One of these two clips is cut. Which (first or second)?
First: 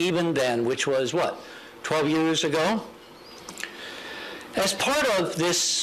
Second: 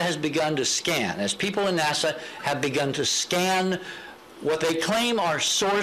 first